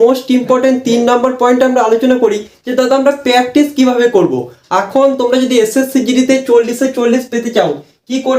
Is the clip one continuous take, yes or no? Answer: yes